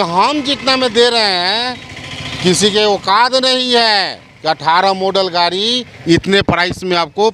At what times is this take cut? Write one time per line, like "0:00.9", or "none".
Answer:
none